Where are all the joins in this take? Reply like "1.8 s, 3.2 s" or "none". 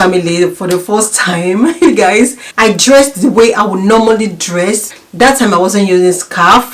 2.4 s